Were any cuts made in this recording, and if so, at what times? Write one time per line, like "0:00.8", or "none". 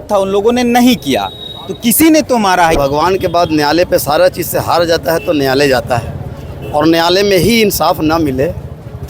0:02.8